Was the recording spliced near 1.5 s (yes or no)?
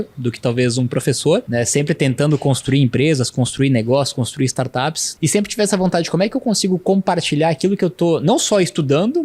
yes